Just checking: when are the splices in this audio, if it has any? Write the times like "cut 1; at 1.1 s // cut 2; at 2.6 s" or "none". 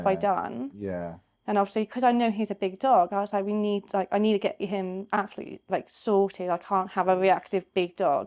none

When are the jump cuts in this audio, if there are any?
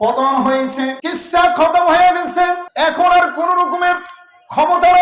cut 1; at 1.0 s // cut 2; at 2.6 s

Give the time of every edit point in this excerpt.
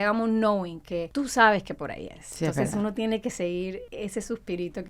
cut 1; at 1.1 s // cut 2; at 3.9 s

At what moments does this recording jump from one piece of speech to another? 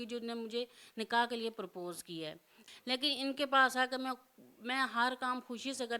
cut 1; at 2.6 s

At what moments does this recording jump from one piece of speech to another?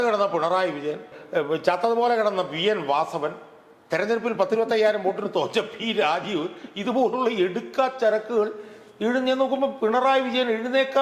cut 1; at 1.1 s

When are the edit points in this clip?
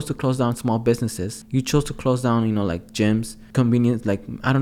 cut 1; at 1.3 s // cut 2; at 3.4 s

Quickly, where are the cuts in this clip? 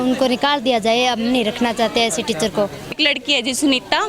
cut 1; at 2.9 s

